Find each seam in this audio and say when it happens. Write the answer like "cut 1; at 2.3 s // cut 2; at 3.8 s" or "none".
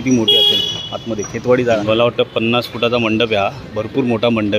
cut 1; at 1.8 s